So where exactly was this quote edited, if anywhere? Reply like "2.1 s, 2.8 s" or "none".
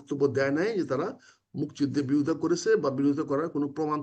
none